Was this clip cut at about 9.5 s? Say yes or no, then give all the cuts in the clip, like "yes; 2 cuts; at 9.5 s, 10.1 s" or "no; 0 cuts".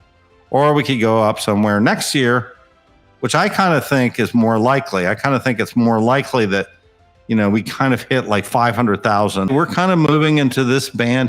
yes; 1 cut; at 9.5 s